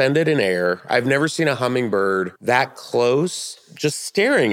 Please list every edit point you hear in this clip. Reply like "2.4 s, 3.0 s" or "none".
2.3 s, 3.6 s